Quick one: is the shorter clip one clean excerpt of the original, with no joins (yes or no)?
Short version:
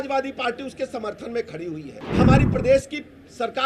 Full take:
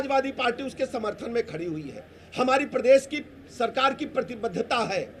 no